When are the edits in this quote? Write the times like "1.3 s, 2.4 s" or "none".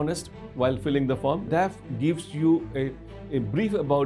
1.5 s

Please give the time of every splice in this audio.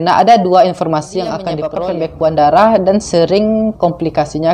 1.6 s

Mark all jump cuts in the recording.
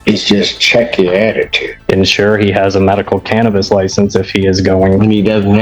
1.8 s

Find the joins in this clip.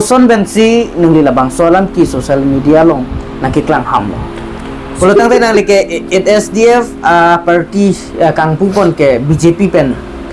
4.8 s

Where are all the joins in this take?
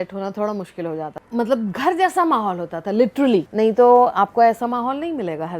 1.2 s, 3.5 s

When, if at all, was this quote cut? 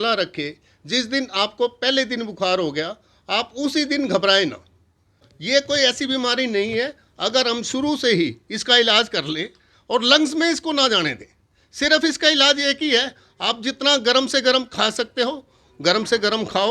5.3 s

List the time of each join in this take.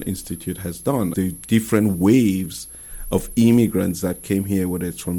1.1 s

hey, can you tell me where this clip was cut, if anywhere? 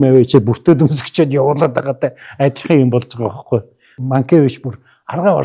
3.9 s

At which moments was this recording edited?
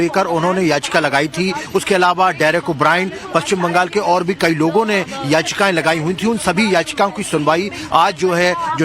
7.2 s

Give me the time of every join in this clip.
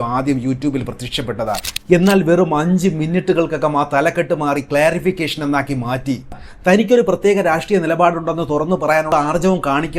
6.4 s

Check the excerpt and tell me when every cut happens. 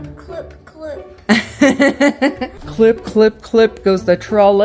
none

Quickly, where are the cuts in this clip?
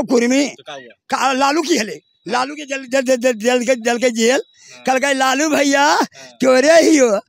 none

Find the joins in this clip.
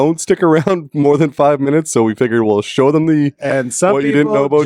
none

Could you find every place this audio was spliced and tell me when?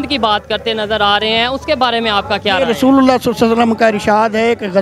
none

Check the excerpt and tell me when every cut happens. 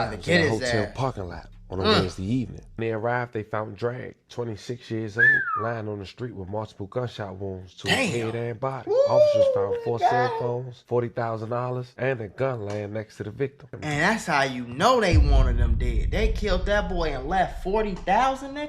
2.6 s, 13.8 s

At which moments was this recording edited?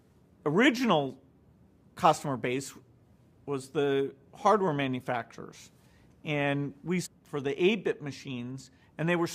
none

